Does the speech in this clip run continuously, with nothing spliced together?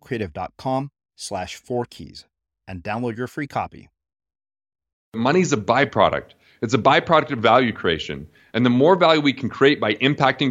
no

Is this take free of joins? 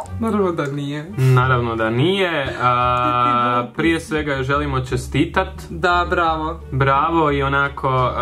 yes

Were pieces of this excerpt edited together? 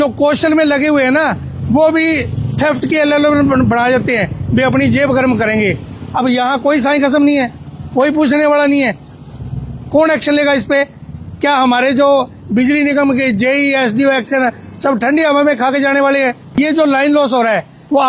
yes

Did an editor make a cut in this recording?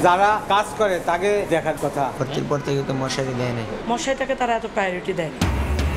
no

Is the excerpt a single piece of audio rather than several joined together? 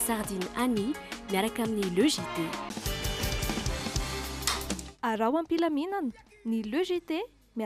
yes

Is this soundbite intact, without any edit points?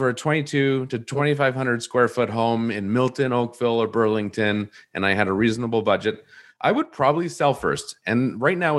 no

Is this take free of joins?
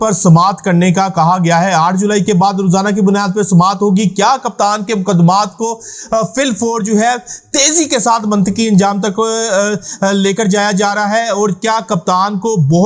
yes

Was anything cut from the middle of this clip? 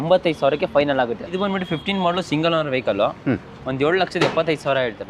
yes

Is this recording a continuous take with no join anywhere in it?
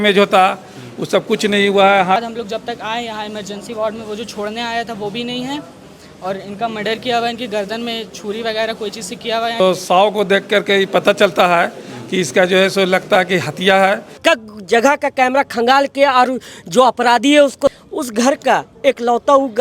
no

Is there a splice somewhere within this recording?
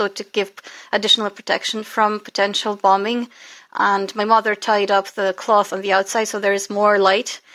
no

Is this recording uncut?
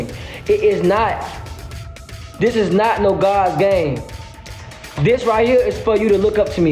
yes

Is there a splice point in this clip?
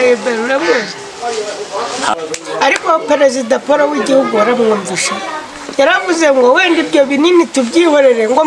yes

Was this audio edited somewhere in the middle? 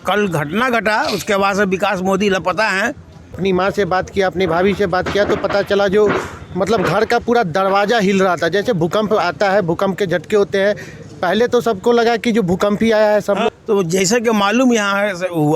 yes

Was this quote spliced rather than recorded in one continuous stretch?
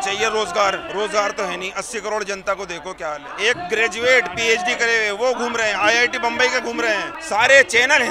yes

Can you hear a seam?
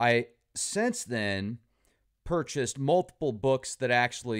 yes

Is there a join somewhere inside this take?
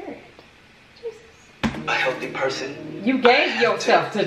no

